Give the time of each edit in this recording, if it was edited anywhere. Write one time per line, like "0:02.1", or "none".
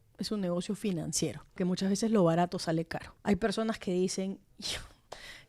0:01.6
0:03.0